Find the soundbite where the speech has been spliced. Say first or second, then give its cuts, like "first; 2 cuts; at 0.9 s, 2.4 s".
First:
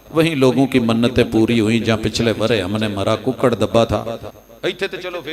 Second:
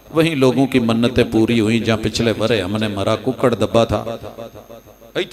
first; 1 cut; at 4.4 s